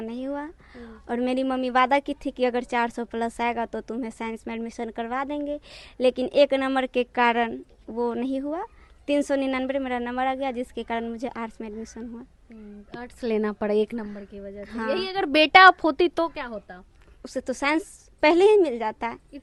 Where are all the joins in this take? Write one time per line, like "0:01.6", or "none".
none